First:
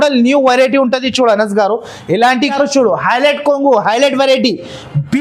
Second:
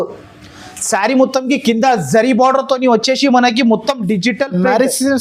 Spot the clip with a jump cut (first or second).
first